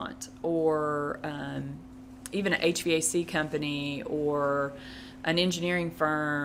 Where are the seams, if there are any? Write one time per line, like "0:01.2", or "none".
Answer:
none

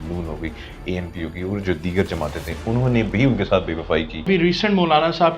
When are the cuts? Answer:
0:04.3

